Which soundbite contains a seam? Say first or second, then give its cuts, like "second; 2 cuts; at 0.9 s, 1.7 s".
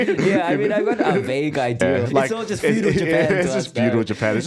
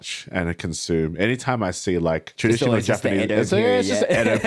first; 1 cut; at 1.9 s